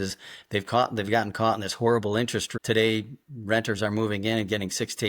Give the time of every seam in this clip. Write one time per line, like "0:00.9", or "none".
0:02.5

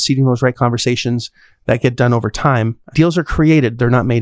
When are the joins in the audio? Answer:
0:02.8

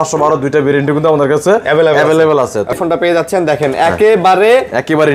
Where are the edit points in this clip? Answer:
0:02.7

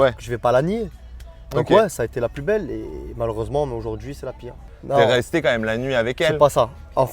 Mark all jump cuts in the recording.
0:04.7

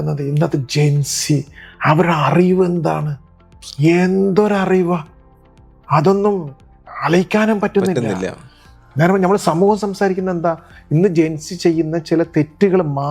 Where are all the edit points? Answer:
none

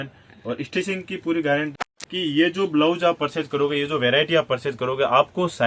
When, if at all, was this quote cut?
0:01.7

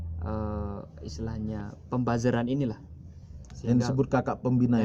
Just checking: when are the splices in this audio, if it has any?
none

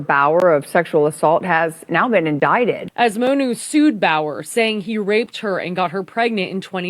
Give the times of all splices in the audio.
0:02.8

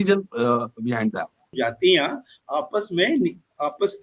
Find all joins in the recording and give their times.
0:01.6

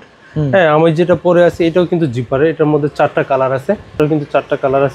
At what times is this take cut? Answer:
0:04.0

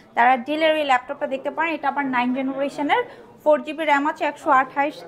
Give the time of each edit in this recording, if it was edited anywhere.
none

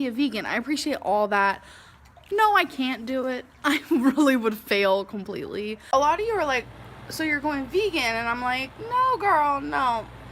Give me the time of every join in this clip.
0:05.8

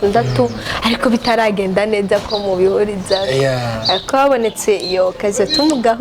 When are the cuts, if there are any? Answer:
none

